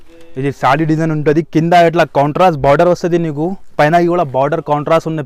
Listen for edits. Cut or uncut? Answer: uncut